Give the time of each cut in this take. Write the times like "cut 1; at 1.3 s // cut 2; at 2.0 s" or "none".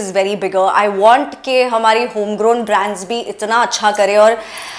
none

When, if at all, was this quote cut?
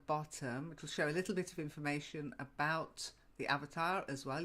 cut 1; at 2.4 s

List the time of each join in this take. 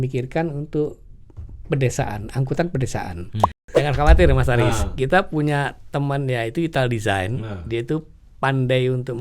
cut 1; at 3.7 s

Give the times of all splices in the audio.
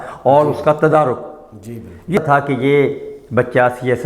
cut 1; at 2.2 s

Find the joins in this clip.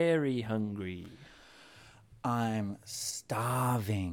none

